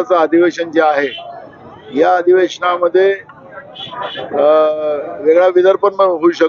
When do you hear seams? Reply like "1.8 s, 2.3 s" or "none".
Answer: none